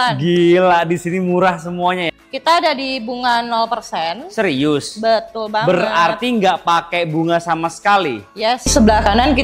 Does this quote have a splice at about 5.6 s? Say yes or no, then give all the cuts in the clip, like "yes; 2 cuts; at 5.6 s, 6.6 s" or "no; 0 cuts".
no; 2 cuts; at 2.1 s, 8.7 s